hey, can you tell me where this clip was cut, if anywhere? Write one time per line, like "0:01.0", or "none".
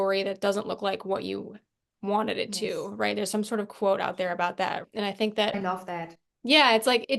none